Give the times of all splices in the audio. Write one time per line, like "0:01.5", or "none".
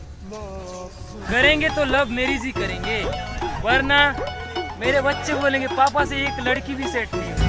0:01.2